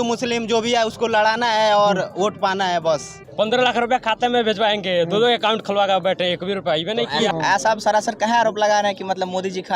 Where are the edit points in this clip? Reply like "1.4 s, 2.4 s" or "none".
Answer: 3.2 s, 7.3 s